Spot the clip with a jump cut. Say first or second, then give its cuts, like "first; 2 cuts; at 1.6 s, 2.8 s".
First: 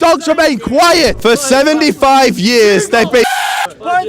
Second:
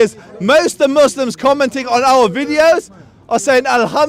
first; 1 cut; at 1.2 s